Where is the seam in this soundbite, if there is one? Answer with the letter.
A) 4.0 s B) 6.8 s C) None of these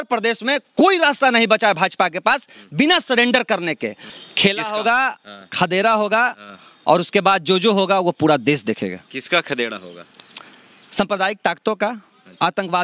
A